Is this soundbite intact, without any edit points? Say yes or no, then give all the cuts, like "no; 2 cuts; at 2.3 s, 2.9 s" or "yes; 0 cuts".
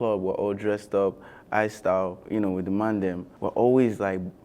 no; 2 cuts; at 2.2 s, 3.3 s